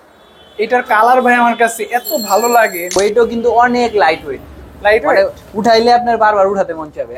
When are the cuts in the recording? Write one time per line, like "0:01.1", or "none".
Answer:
0:03.0